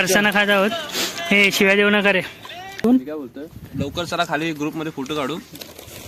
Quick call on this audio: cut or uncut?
cut